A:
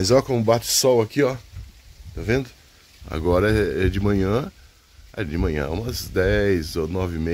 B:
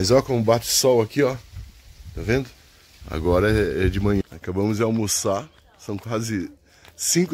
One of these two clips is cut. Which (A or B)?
B